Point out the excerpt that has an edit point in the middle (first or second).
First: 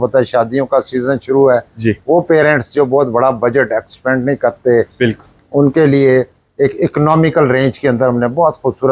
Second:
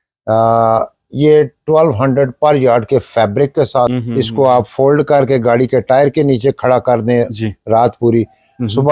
second